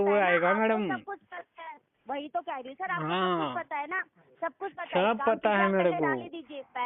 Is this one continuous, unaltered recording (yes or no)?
yes